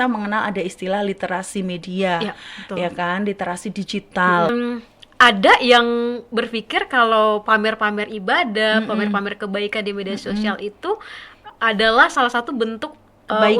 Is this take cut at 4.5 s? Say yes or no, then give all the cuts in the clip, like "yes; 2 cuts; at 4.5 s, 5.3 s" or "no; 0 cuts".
yes; 1 cut; at 4.5 s